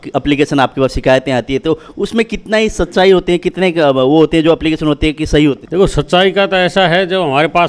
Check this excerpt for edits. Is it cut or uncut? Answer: cut